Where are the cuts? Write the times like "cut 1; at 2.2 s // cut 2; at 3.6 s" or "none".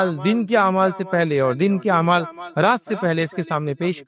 none